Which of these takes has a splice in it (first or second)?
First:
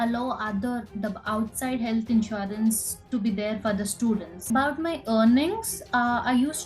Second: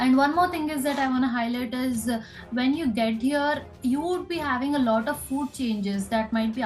first